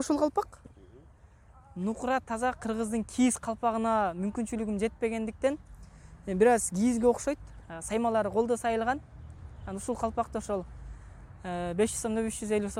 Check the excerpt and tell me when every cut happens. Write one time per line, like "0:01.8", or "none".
none